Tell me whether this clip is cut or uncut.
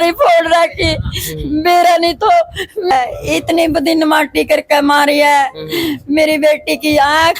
cut